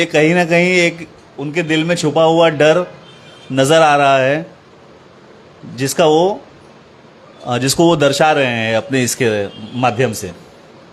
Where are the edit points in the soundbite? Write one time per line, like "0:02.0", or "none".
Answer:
none